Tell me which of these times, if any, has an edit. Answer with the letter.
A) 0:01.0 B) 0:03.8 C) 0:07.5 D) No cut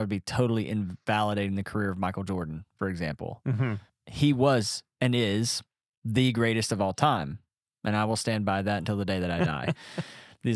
B